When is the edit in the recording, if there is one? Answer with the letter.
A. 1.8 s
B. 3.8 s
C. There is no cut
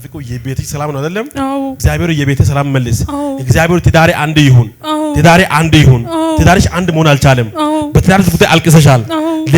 A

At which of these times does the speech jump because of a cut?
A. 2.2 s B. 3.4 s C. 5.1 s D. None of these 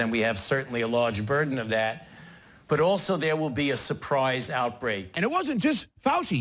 C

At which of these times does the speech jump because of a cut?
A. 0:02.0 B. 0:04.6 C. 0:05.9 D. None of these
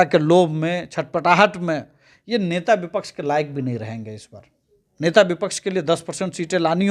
D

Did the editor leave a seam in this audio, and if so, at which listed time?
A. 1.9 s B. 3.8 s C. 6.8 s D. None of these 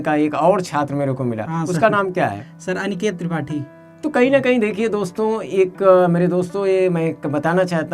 D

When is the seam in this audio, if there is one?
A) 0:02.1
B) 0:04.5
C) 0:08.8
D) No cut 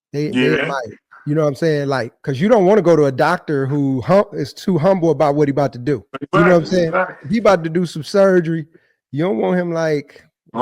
A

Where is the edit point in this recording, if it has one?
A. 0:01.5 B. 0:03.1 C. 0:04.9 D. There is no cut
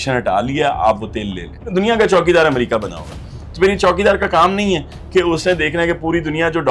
A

